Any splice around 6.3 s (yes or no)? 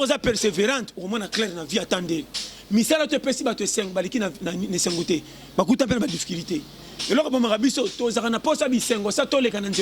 no